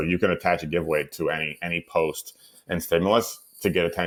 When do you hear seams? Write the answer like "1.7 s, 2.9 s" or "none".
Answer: none